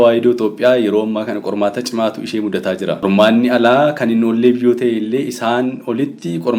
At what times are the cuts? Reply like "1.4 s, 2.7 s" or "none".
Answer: 3.0 s